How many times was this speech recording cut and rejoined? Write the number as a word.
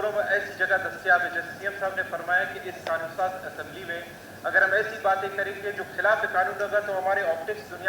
zero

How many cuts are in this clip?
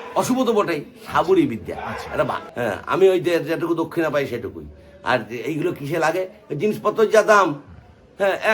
one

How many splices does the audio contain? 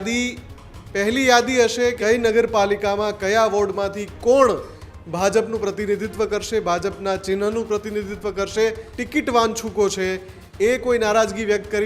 two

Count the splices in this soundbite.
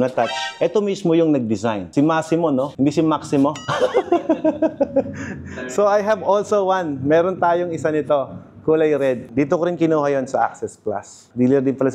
zero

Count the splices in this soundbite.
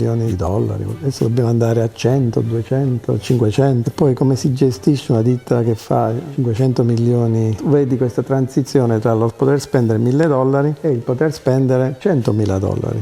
two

